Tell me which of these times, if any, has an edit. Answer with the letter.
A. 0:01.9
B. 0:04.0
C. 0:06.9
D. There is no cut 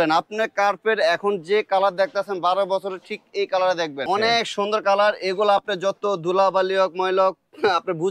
B